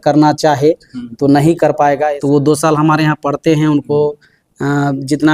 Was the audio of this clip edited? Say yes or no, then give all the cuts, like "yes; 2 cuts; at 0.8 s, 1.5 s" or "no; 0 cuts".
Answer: yes; 1 cut; at 2.2 s